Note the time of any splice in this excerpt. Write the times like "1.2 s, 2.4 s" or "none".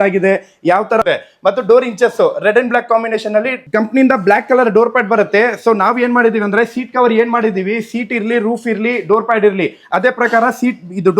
1.0 s, 3.6 s